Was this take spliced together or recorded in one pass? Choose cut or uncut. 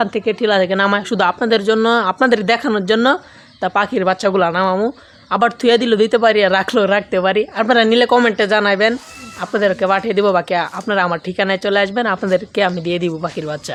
uncut